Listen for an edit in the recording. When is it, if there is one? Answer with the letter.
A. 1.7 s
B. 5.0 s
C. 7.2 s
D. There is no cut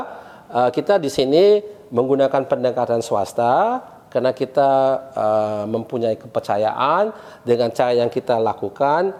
D